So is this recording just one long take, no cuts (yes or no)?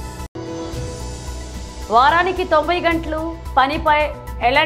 yes